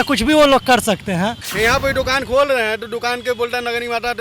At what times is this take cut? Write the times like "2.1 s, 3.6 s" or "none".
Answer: 1.5 s